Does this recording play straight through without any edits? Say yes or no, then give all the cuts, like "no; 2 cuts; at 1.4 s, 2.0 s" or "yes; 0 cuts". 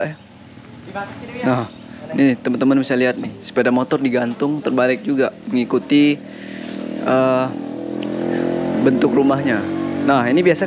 yes; 0 cuts